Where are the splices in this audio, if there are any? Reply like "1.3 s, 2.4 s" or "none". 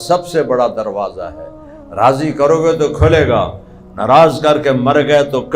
none